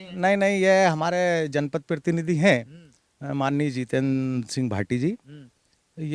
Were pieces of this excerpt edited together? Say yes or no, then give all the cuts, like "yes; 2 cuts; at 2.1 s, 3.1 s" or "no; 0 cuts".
no; 0 cuts